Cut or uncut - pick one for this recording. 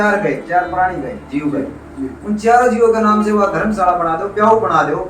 uncut